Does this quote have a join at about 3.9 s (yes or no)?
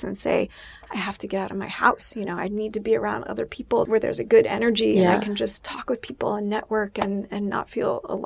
yes